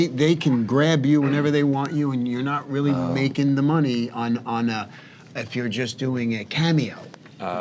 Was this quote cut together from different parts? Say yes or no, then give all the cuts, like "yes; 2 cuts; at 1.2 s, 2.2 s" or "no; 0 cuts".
no; 0 cuts